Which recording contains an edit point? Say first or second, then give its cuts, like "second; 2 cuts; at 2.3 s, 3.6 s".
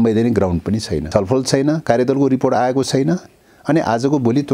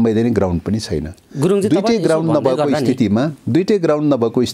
first; 1 cut; at 1.0 s